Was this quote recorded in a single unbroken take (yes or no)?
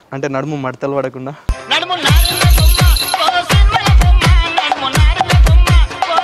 yes